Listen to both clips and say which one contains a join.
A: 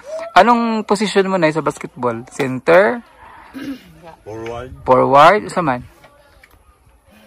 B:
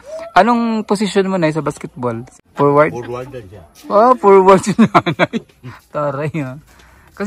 B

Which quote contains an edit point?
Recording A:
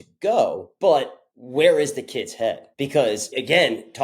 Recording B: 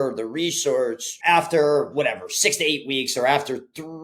A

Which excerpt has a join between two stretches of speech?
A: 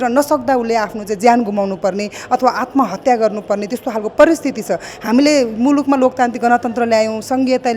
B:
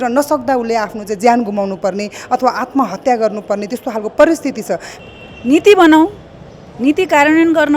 B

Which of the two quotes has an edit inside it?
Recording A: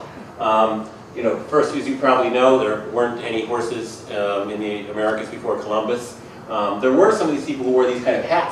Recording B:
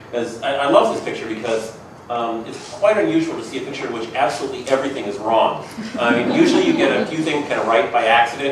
A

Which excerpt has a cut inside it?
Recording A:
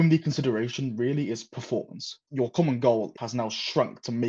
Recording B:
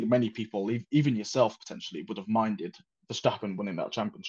A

